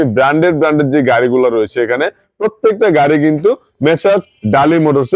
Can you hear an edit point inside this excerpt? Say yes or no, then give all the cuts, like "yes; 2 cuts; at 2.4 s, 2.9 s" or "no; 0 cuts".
no; 0 cuts